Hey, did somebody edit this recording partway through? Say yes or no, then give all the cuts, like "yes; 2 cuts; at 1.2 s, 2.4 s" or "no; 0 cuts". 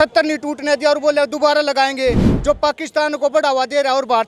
no; 0 cuts